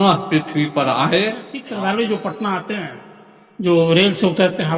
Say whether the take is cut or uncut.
cut